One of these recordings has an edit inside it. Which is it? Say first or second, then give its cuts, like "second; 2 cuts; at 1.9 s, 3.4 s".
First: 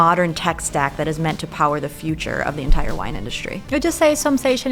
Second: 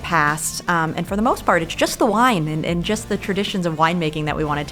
first; 1 cut; at 3.6 s